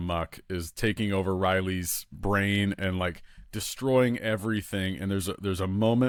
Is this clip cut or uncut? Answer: uncut